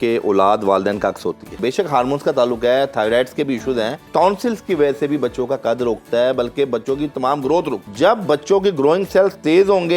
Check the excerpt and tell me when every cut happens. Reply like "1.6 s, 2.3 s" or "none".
1.5 s, 4.1 s, 7.8 s